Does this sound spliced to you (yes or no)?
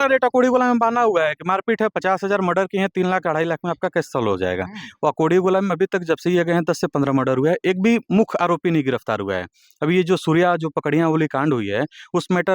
no